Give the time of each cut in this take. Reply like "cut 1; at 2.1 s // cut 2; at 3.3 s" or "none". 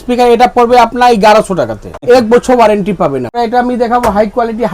cut 1; at 2.0 s // cut 2; at 3.3 s